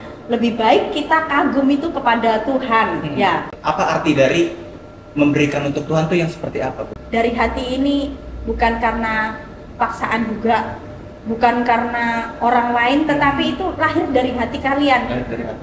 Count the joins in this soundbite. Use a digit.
2